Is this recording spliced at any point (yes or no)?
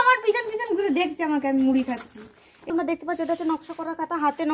yes